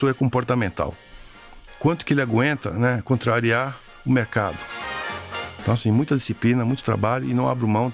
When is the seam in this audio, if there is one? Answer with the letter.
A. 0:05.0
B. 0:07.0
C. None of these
A